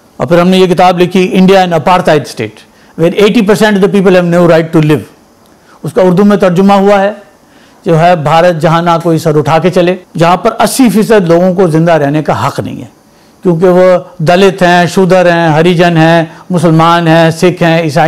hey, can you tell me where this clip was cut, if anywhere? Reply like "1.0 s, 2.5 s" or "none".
10.1 s